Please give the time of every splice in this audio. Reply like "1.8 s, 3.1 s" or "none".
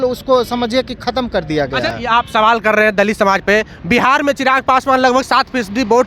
none